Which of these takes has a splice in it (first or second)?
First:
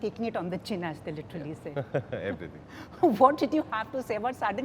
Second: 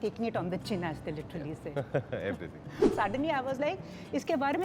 second